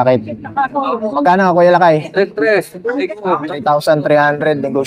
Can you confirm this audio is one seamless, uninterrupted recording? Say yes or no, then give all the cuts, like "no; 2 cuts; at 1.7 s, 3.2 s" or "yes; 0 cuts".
yes; 0 cuts